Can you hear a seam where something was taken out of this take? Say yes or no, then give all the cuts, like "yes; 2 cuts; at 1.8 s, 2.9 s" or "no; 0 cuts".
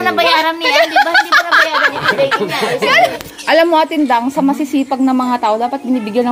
yes; 1 cut; at 3.3 s